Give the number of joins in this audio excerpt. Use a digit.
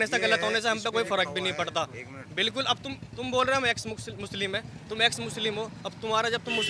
0